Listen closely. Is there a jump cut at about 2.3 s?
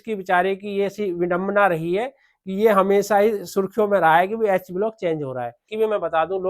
no; 1 cut; at 5.6 s

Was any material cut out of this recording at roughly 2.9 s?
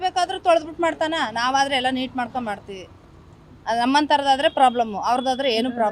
no; 0 cuts

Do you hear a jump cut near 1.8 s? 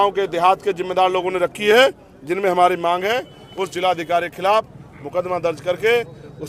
no; 0 cuts

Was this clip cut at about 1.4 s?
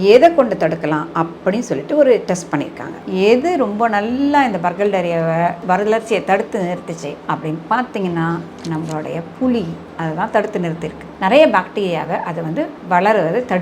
no; 3 cuts; at 3.0 s, 5.6 s, 11.1 s

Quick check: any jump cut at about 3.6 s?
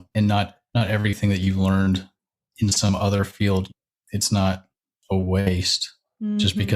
yes; 1 cut; at 3.6 s

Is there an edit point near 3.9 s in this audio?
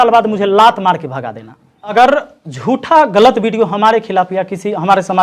no; 1 cut; at 1.9 s

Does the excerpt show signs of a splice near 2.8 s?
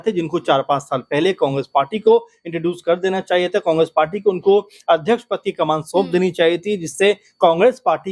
no; 0 cuts

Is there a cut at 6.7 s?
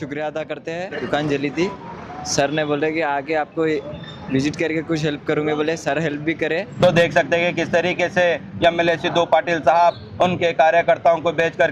yes; 2 cuts; at 1.0 s, 6.7 s

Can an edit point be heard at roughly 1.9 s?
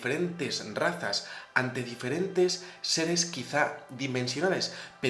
yes; 1 cut; at 1.9 s

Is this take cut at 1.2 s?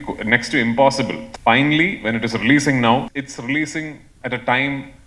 yes; 2 cuts; at 1.2 s, 3.2 s

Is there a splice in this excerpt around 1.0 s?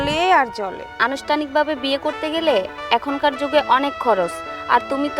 yes; 1 cut; at 1.0 s

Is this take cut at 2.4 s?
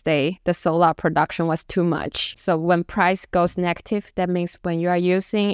yes; 1 cut; at 2.4 s

